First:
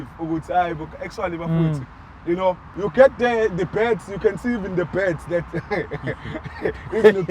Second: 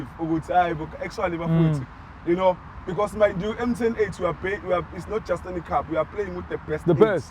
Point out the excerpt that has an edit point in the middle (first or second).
first